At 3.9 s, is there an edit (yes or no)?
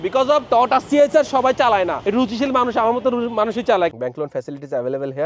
yes